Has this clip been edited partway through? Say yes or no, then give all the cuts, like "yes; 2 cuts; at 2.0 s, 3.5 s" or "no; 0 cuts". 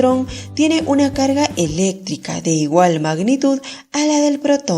yes; 1 cut; at 1.1 s